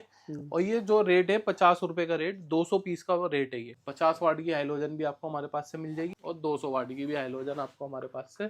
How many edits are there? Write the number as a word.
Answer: two